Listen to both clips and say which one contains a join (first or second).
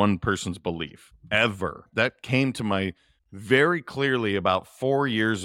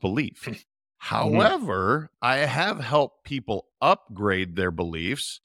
first